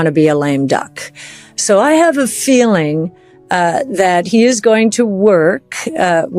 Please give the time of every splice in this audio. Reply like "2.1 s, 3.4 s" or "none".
none